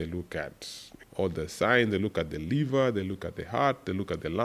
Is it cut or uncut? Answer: cut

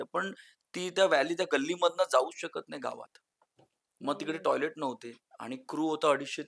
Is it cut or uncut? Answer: uncut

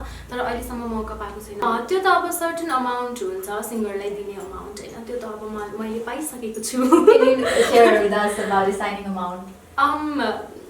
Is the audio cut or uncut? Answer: cut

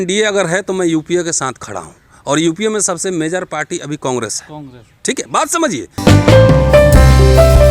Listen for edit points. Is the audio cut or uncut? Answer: uncut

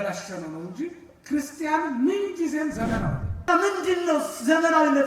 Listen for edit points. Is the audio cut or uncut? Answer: cut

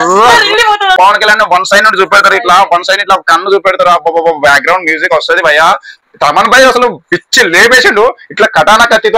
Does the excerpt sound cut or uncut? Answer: cut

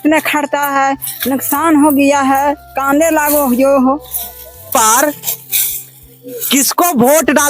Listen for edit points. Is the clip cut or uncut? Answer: cut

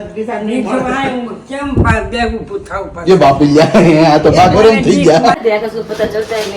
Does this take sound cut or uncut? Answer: cut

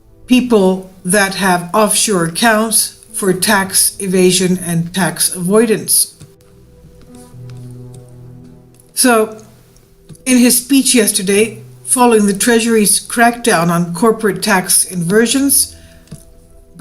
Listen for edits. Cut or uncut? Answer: cut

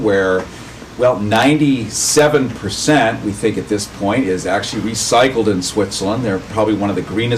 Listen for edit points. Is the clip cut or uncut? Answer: uncut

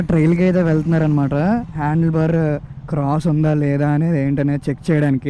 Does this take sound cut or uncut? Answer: uncut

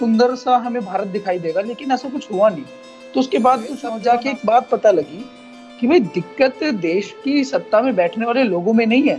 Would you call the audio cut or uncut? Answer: cut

